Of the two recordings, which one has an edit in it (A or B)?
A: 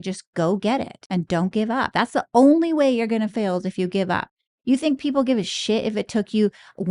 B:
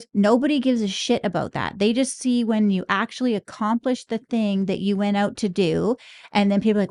A